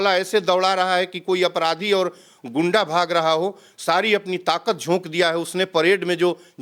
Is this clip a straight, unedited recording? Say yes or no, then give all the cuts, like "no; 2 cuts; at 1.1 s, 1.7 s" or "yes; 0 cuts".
yes; 0 cuts